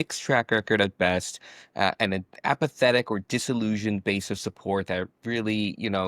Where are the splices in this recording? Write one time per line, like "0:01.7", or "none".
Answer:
none